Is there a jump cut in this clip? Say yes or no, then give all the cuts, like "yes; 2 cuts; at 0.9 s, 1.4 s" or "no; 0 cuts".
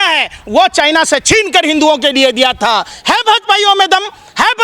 no; 0 cuts